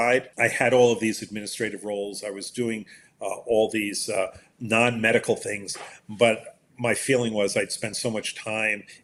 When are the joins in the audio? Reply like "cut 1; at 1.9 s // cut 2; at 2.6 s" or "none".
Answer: none